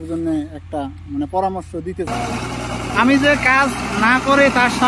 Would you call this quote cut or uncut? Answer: cut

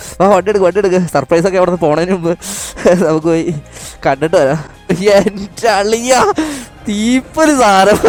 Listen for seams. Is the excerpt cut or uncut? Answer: uncut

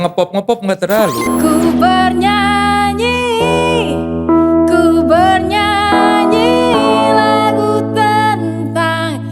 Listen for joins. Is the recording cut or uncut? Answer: cut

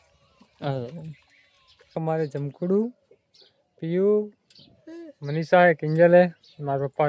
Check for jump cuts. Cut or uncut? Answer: cut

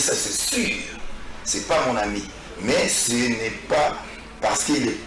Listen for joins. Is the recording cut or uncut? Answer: uncut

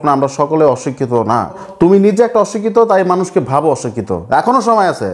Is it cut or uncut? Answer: cut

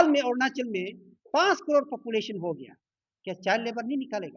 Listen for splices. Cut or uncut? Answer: uncut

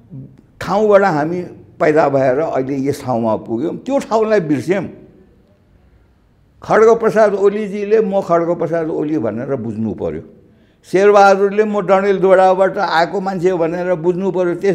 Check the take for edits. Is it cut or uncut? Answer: uncut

